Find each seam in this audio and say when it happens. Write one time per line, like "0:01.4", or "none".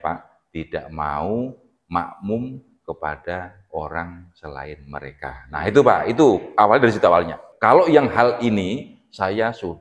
0:07.4